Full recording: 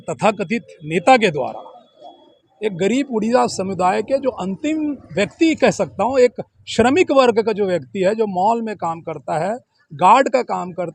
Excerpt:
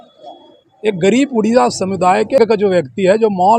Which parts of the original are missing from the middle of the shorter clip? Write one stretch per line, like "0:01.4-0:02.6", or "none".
0:04.2-0:07.4